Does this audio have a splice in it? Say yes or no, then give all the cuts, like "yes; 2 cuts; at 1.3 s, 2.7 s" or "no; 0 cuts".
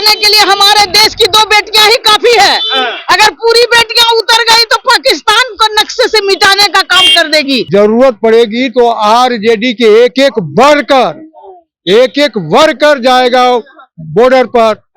yes; 1 cut; at 7.7 s